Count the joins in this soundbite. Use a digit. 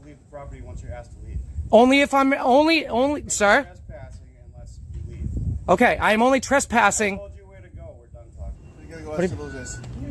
1